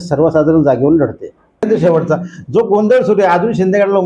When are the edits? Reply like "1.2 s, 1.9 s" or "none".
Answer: 1.6 s